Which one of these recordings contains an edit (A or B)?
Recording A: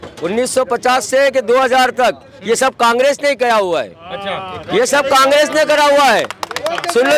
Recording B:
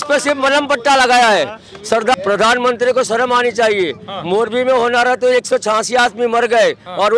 B